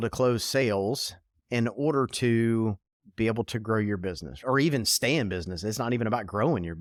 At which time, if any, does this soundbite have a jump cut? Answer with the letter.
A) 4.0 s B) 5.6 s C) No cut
C